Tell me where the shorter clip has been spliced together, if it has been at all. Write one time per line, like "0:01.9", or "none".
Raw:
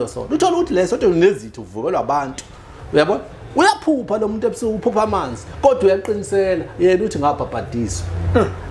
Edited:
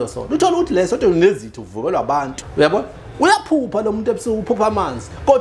0:02.4

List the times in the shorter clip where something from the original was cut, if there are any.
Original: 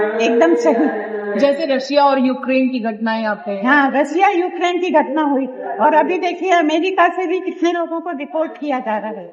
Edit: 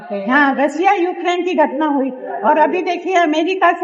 none

